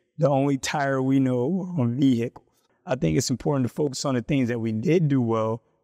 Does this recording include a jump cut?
yes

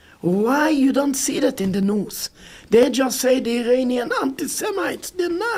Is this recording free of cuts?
yes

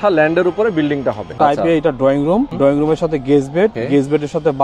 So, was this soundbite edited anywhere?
yes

